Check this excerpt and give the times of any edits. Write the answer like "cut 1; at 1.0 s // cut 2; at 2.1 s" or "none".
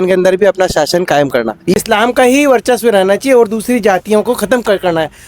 cut 1; at 1.8 s